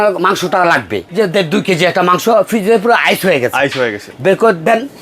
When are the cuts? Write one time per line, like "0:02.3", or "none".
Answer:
0:01.0
0:04.0

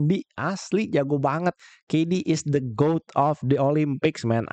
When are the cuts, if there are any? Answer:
none

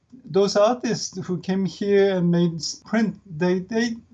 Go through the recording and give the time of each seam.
0:02.8

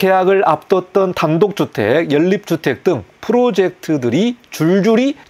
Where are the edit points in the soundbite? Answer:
none

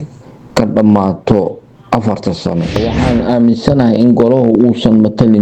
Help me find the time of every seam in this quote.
0:02.8

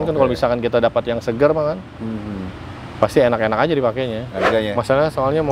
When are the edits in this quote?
0:04.5

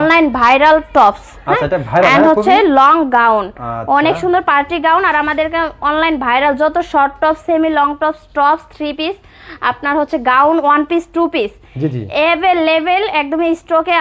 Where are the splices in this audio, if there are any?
none

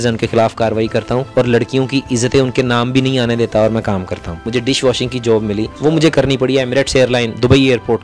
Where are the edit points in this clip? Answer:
0:01.3
0:04.4
0:05.7

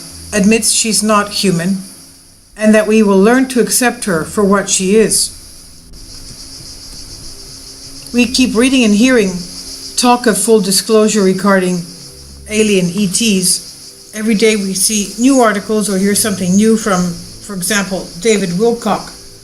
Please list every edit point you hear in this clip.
0:13.0

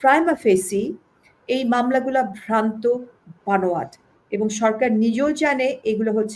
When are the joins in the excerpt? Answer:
none

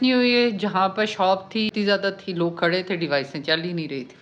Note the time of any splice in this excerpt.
0:01.7

